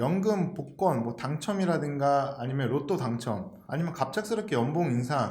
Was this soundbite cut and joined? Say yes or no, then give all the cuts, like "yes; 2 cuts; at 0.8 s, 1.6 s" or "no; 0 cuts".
no; 0 cuts